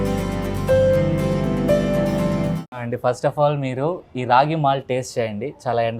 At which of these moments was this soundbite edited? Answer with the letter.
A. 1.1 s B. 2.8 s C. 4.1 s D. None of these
B